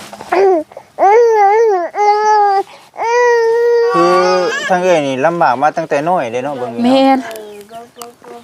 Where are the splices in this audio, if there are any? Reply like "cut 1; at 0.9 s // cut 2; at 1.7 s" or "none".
cut 1; at 3.9 s

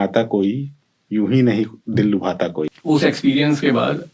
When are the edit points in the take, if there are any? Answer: cut 1; at 2.6 s

